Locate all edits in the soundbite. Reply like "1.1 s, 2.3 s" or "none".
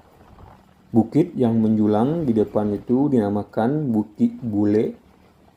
none